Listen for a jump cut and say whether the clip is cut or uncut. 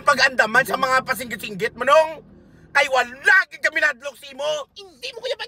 uncut